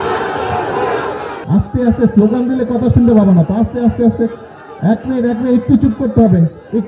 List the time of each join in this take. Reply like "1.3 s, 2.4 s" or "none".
1.3 s